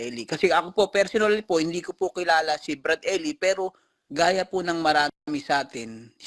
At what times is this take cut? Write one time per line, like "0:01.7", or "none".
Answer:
none